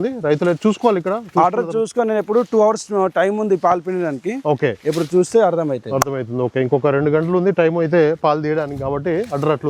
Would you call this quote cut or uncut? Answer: uncut